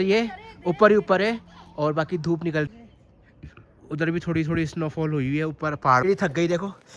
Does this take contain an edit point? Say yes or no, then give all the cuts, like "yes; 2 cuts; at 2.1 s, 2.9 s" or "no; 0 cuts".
yes; 2 cuts; at 2.7 s, 6.0 s